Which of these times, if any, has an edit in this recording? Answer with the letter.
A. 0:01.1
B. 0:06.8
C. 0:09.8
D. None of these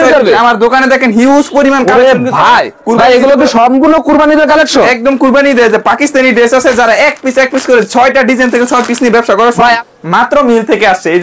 C